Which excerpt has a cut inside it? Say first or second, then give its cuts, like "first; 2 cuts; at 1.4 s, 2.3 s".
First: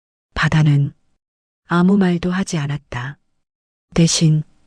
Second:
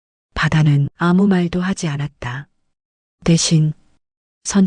second; 1 cut; at 0.9 s